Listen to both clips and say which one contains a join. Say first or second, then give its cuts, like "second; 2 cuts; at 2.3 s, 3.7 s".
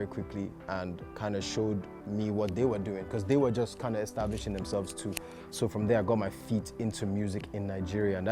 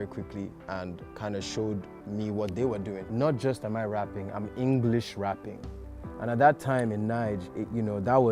second; 1 cut; at 3.0 s